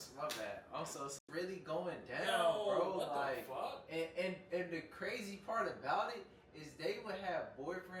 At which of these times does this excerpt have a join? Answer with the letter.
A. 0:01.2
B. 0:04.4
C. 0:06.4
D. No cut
A